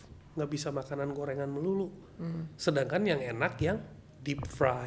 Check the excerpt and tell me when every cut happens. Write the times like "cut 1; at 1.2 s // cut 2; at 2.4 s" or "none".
none